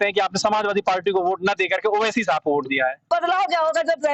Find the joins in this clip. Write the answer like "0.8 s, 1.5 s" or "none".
3.0 s